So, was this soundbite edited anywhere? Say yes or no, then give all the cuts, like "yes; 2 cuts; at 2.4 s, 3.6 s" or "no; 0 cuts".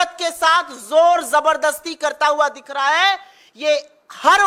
no; 0 cuts